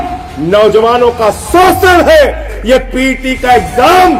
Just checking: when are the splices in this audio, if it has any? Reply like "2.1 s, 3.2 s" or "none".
2.5 s